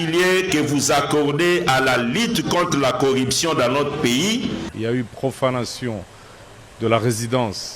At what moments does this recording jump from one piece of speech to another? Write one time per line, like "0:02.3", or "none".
0:04.7